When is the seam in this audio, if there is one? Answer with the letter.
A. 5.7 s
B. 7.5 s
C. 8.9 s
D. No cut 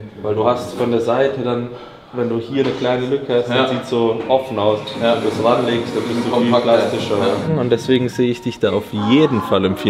B